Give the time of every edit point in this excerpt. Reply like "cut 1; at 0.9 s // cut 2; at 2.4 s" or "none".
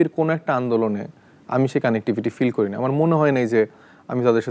none